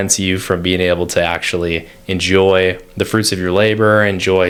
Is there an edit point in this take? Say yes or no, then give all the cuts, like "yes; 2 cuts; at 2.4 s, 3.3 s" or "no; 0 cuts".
no; 0 cuts